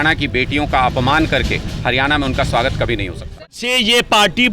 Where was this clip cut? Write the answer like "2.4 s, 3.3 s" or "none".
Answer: 3.5 s